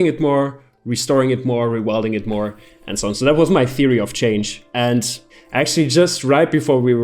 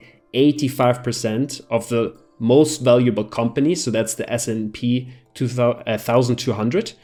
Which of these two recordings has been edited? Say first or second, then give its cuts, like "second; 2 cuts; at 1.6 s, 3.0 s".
first; 1 cut; at 5.2 s